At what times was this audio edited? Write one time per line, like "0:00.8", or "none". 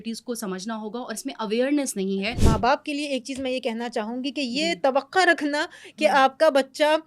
0:02.3